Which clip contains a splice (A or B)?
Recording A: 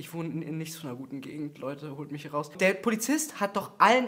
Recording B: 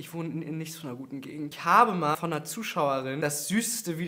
B